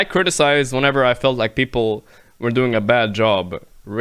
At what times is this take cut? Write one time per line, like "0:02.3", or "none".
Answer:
none